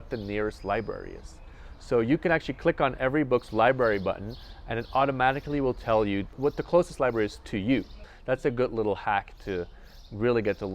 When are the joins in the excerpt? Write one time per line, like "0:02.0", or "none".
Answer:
0:06.4
0:08.1